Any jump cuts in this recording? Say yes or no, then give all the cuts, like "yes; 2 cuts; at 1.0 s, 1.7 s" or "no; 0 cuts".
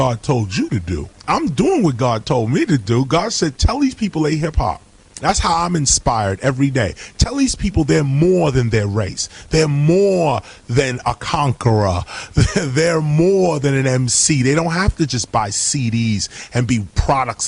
no; 0 cuts